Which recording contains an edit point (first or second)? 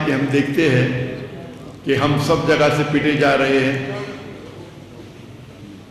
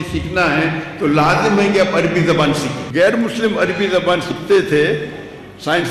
second